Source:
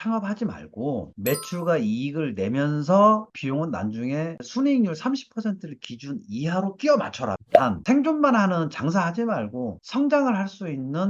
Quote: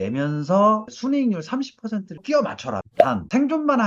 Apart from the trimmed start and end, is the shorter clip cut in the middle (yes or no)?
yes